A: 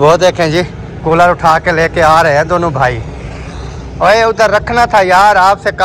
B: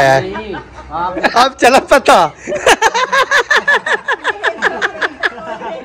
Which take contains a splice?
B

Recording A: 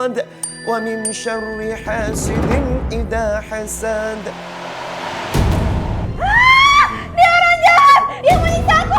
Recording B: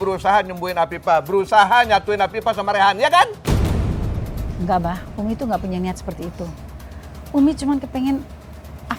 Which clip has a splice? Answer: A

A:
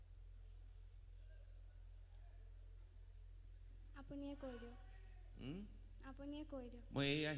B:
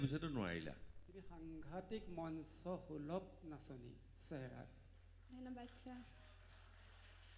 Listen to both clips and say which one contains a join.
B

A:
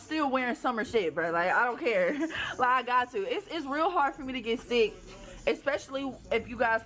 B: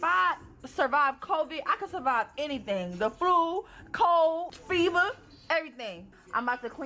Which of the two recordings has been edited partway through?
A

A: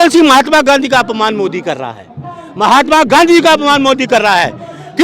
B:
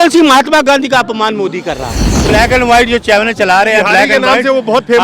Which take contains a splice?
B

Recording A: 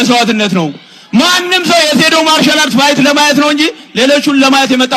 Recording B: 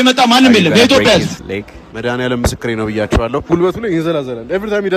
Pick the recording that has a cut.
B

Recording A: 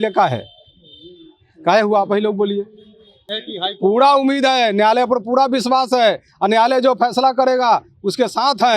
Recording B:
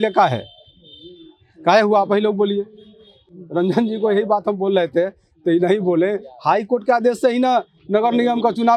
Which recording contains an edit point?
A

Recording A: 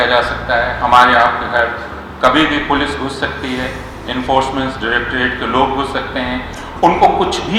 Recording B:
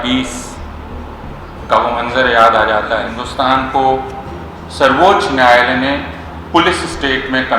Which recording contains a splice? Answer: B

